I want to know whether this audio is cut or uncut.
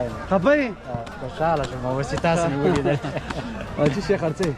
uncut